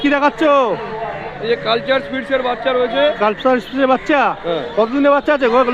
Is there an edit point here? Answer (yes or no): no